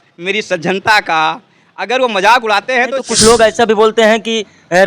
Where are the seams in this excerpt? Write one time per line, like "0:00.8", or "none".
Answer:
0:03.1